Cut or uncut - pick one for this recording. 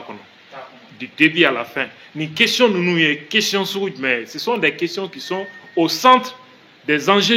uncut